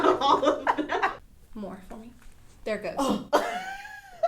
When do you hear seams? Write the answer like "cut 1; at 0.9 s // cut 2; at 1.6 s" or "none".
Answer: cut 1; at 1.2 s